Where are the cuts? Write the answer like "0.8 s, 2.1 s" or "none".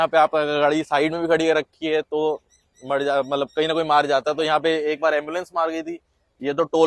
none